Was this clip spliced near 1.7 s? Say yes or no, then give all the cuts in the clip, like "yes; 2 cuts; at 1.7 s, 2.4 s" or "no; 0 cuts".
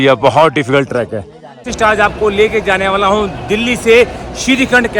yes; 1 cut; at 1.7 s